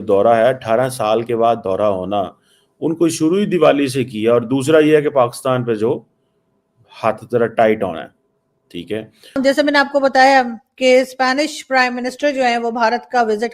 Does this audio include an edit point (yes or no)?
yes